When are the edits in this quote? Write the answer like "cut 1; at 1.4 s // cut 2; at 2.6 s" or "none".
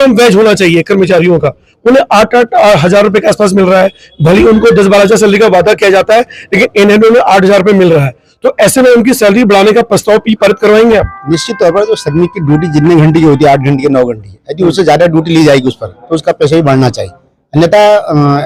none